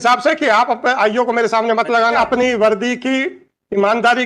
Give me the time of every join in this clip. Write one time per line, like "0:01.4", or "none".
0:02.2